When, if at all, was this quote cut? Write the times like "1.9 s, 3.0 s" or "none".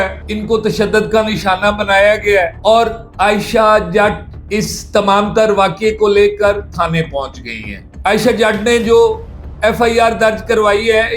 7.8 s